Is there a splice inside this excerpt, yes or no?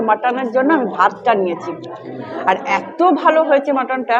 no